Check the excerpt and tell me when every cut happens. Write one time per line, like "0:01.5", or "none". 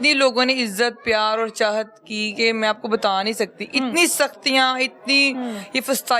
none